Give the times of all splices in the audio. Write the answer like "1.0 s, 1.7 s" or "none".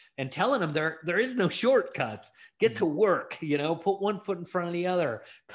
none